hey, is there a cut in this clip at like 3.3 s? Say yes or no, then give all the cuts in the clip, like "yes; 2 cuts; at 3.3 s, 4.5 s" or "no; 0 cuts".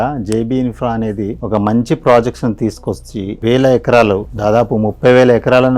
yes; 1 cut; at 3.3 s